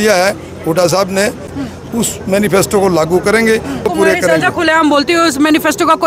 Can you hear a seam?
yes; 2 cuts; at 1.5 s, 3.9 s

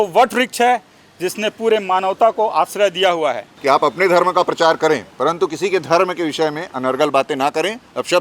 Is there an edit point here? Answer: yes; 1 cut; at 3.5 s

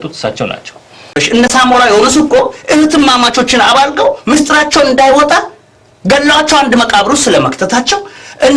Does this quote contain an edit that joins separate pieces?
yes; 1 cut; at 1.2 s

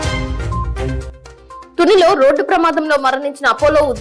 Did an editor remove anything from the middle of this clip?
yes; 1 cut; at 1.1 s

